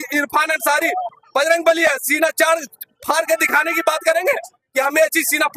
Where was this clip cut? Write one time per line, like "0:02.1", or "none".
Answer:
none